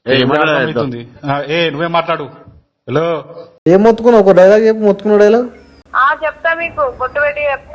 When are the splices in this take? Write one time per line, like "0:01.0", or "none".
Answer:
0:03.5